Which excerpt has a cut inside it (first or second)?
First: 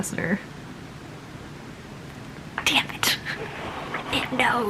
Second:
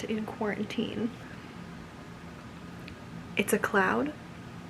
second